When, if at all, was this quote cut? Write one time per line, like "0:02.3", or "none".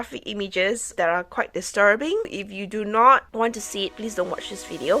0:00.9
0:02.2
0:03.3